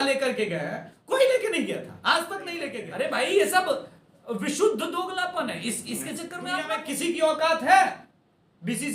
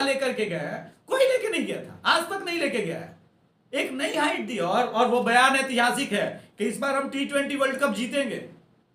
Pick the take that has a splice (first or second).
first